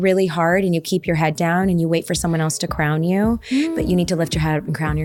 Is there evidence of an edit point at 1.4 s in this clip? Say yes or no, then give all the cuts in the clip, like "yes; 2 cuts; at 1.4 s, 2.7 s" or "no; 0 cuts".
no; 0 cuts